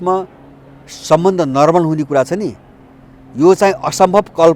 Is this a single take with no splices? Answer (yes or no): yes